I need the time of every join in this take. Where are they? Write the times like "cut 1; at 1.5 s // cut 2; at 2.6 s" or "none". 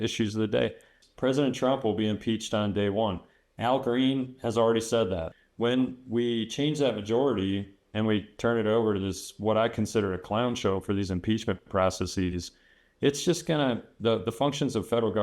cut 1; at 1.0 s // cut 2; at 5.3 s